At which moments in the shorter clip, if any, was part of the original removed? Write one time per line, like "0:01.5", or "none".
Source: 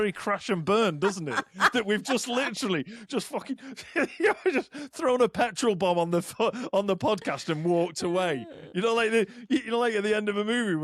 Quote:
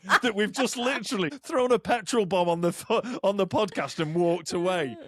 0:01.4